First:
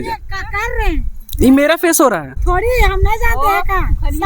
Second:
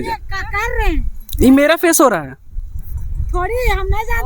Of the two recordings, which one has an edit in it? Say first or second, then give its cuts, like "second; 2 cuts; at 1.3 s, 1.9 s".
first; 1 cut; at 2.3 s